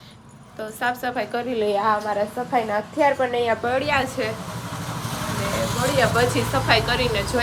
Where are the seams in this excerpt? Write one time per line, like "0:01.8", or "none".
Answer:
none